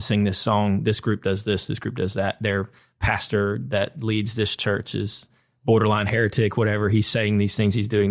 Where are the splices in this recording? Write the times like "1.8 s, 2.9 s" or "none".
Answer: none